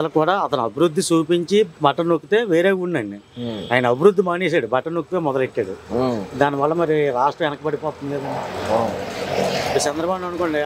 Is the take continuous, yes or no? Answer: yes